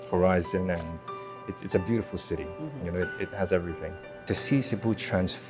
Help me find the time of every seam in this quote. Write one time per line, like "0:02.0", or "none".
0:04.3

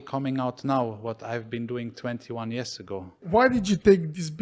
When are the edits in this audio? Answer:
0:03.2

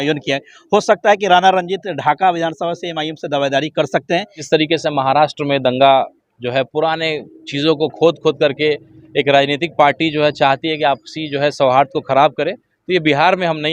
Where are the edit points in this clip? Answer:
0:04.4

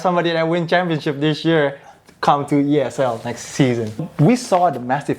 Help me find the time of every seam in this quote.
0:04.0

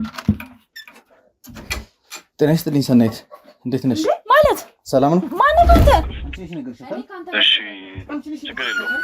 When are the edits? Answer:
0:06.0

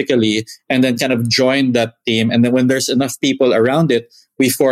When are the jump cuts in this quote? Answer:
none

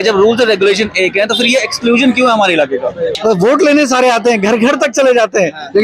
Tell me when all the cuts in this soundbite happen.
0:03.1

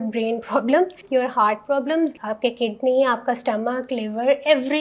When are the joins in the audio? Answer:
0:01.0
0:02.2

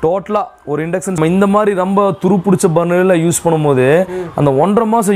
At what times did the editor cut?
0:01.2

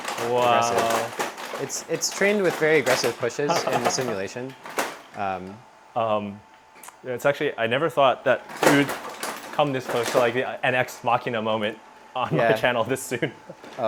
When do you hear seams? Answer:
none

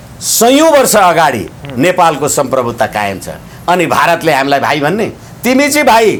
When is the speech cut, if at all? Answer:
none

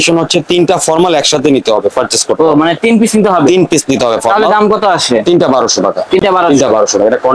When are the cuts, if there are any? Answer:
none

